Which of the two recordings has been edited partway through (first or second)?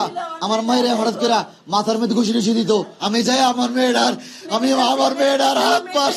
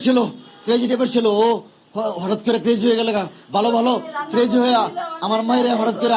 first